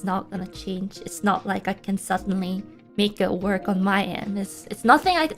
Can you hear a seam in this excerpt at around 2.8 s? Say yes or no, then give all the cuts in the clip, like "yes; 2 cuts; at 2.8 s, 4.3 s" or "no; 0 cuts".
yes; 1 cut; at 2.8 s